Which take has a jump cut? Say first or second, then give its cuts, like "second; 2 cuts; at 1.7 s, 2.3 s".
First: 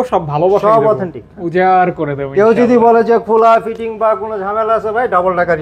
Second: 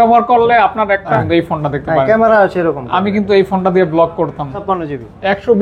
second; 2 cuts; at 1.1 s, 4.6 s